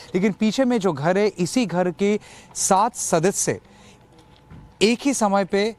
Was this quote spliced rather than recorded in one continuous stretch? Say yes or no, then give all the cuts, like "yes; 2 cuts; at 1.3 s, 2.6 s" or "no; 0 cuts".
no; 0 cuts